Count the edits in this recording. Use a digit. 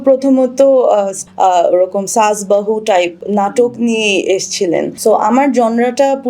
3